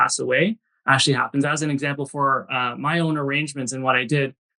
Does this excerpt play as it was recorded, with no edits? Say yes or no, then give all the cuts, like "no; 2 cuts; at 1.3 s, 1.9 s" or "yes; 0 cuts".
yes; 0 cuts